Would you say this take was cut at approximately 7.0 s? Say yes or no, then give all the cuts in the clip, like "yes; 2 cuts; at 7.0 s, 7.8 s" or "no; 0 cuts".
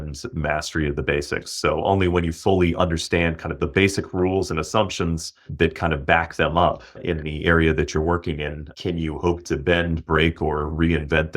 yes; 3 cuts; at 5.5 s, 7.0 s, 8.7 s